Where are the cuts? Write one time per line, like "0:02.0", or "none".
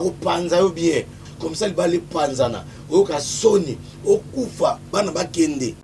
0:01.2